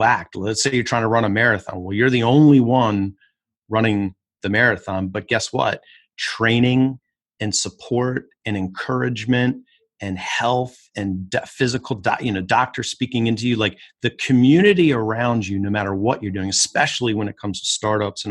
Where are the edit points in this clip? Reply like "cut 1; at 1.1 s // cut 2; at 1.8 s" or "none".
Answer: none